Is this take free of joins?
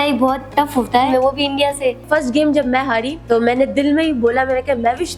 no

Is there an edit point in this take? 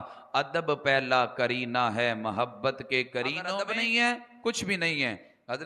yes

